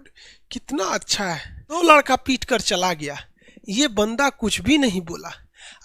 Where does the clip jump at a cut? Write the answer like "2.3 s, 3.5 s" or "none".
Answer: 1.8 s